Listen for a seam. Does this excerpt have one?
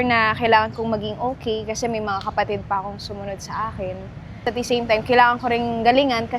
no; 0 cuts

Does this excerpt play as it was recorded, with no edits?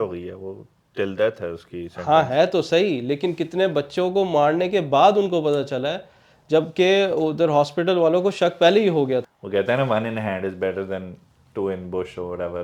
no; 1 cut; at 9.4 s

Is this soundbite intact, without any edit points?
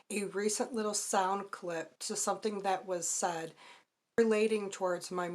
no; 1 cut; at 4.2 s

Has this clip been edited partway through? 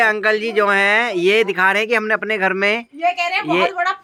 no; 0 cuts

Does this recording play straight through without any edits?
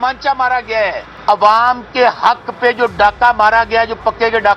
no; 1 cut; at 1.1 s

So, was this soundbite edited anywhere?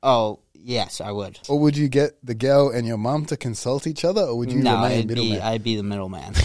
yes; 1 cut; at 1.3 s

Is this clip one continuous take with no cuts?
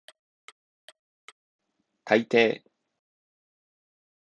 no; 1 cut; at 1.4 s

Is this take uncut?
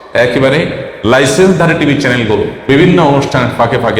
no; 1 cut; at 2.5 s

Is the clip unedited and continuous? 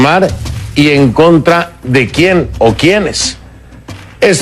yes; 0 cuts

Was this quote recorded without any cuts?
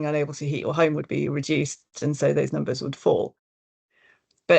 no; 1 cut; at 3.7 s

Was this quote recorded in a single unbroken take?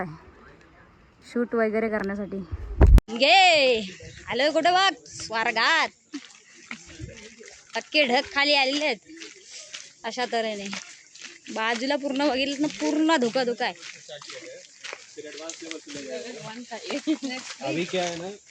no; 1 cut; at 3.1 s

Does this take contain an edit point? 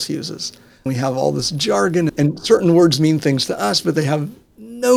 yes; 2 cuts; at 0.9 s, 2.1 s

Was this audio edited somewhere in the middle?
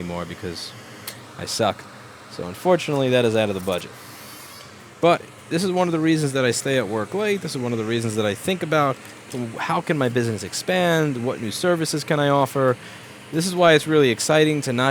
no; 0 cuts

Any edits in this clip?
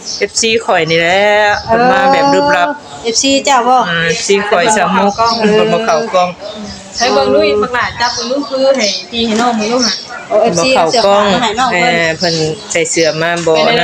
no; 0 cuts

